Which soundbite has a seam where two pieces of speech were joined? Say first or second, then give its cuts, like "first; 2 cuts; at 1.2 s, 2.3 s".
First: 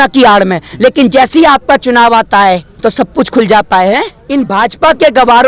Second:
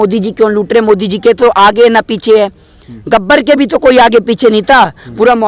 first; 2 cuts; at 2.7 s, 4.2 s